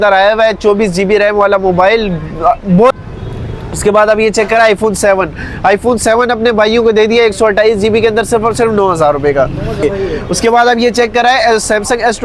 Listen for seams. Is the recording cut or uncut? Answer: cut